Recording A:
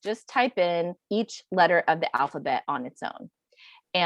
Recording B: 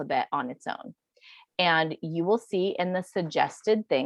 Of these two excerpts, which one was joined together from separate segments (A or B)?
A